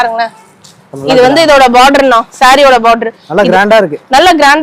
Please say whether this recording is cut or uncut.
uncut